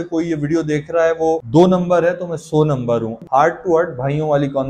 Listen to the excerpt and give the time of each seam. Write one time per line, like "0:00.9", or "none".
0:03.2